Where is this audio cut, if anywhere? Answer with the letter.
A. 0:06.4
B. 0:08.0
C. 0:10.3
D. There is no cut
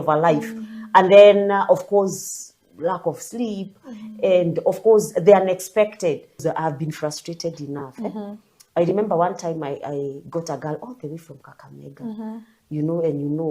A